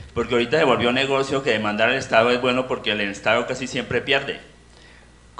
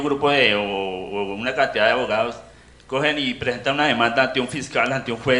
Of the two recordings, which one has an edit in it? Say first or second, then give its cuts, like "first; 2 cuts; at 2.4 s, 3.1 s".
second; 1 cut; at 2.4 s